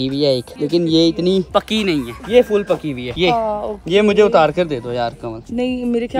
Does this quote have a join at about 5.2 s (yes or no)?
no